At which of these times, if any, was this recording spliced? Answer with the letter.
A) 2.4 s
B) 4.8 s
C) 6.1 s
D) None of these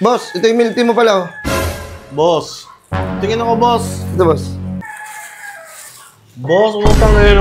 B